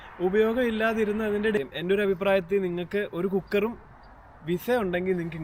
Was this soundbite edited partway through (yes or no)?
yes